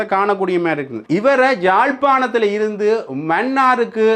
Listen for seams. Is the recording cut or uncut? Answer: cut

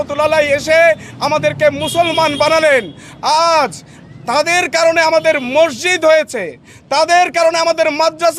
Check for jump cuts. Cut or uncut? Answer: uncut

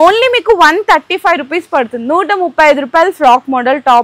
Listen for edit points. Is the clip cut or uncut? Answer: uncut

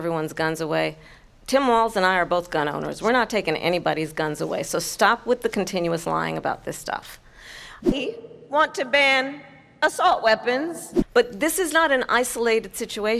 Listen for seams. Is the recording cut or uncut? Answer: uncut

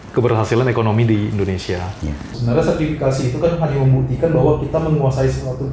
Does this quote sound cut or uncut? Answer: cut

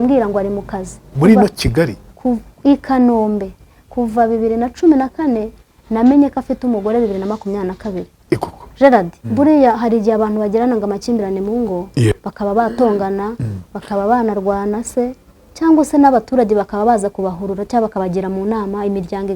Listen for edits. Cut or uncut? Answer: cut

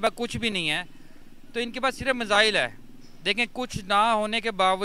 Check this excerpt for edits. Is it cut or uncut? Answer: uncut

